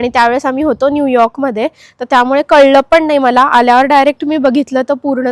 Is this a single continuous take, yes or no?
yes